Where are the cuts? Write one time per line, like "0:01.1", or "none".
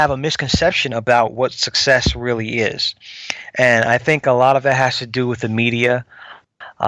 none